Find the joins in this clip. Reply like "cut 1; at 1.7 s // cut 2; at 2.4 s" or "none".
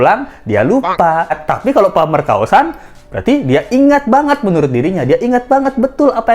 cut 1; at 1.3 s